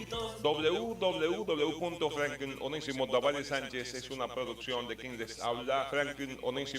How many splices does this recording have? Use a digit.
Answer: 1